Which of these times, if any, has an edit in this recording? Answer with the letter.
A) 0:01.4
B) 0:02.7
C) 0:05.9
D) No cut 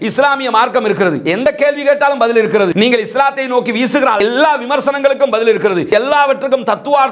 C